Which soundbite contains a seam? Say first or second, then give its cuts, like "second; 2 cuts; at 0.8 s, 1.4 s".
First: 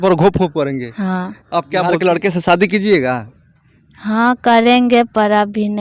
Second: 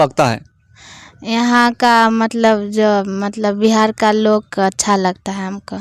first; 1 cut; at 1.8 s